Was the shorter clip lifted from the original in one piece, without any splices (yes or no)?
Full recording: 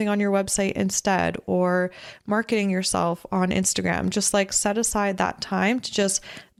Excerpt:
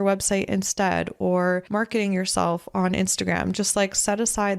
no